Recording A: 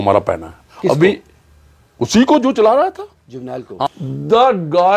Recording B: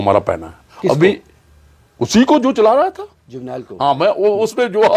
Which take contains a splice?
A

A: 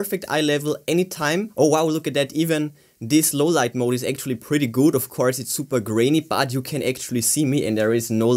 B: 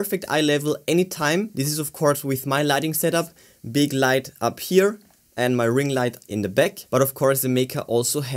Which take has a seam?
A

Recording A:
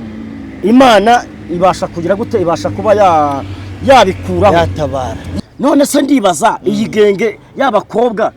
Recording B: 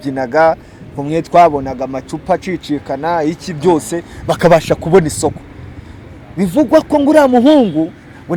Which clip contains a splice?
A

